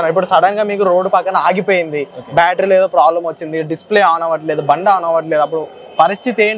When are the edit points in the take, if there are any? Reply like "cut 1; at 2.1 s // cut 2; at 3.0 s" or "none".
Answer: none